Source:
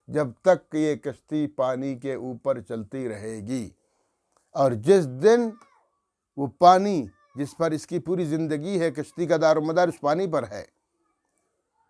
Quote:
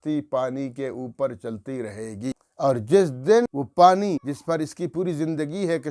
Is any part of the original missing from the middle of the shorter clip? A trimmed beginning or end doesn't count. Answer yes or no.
yes